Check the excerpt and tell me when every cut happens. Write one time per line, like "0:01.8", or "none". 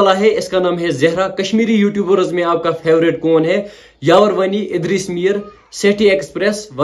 none